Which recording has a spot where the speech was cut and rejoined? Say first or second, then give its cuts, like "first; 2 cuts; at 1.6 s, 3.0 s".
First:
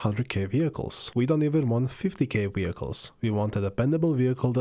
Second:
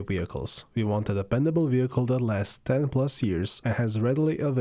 second; 1 cut; at 3.6 s